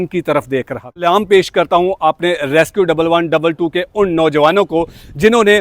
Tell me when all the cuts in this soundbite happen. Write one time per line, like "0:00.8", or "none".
0:01.0